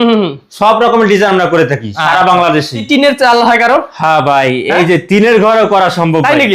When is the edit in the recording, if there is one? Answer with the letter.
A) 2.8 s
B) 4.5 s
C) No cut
A